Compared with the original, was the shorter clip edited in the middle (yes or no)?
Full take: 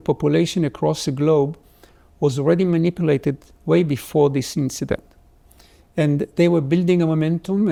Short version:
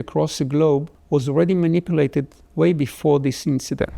yes